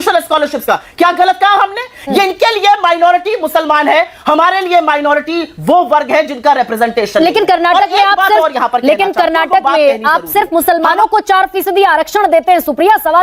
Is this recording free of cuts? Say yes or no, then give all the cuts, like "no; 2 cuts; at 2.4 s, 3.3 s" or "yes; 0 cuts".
yes; 0 cuts